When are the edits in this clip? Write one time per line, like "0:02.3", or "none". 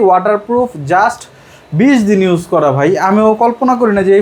none